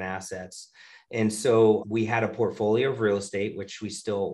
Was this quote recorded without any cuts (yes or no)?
no